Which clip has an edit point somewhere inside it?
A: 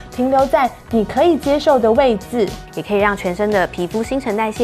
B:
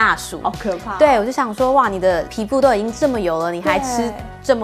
A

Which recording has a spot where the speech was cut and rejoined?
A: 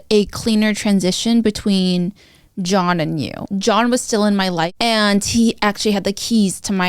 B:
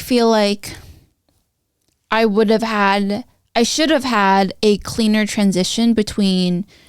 A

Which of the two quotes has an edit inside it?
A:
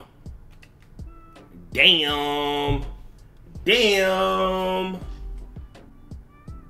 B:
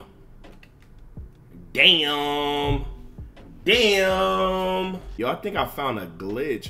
B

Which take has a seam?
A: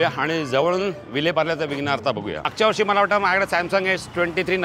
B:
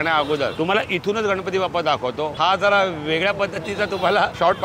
A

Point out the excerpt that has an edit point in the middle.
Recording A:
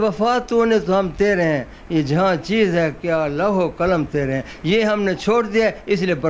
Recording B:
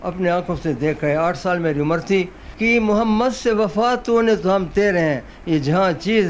B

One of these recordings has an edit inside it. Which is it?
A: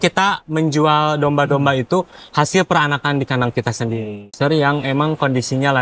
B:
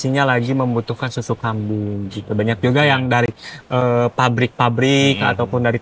A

